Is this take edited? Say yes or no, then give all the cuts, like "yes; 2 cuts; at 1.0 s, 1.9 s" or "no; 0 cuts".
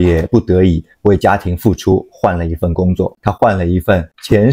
yes; 1 cut; at 3.1 s